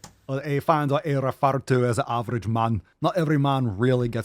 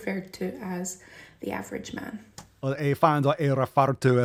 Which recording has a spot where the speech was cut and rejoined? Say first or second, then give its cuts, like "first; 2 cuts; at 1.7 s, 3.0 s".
first; 1 cut; at 2.9 s